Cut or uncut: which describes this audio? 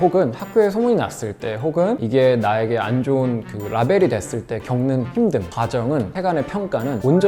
uncut